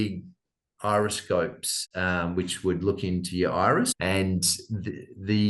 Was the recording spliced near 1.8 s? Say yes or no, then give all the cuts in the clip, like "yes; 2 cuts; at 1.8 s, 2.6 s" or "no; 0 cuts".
no; 1 cut; at 4.0 s